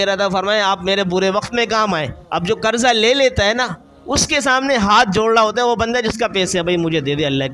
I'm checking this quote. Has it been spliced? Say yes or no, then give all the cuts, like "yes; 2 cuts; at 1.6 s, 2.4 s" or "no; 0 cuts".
yes; 1 cut; at 2.2 s